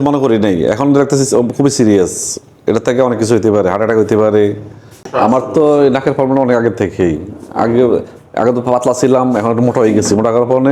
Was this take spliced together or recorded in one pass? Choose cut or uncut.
cut